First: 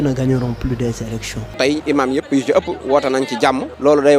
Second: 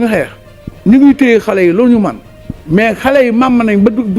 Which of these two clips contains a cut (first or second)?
first